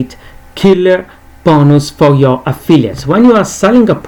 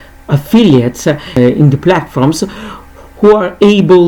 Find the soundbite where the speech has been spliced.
second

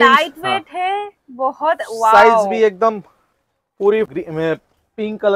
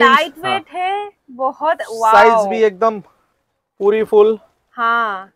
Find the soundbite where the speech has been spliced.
first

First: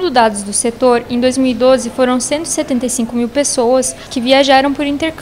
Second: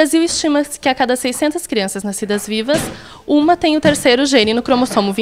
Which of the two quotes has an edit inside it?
first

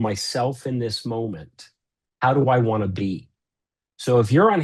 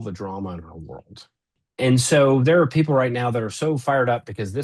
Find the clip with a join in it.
second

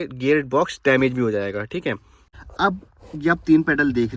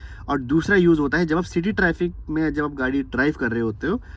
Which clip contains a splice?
first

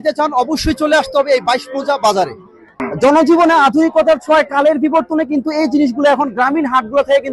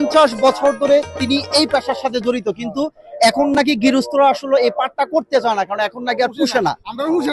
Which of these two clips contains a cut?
first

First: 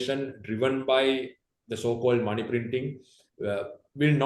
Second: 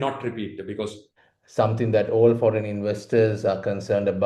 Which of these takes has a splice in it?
second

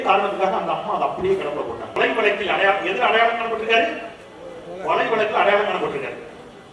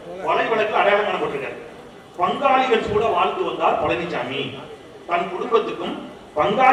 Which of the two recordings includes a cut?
first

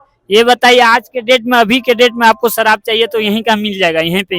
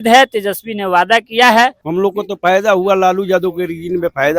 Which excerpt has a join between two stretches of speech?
second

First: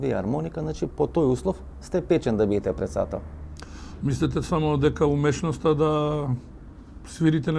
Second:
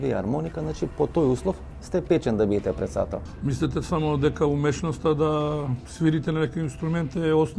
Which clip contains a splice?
second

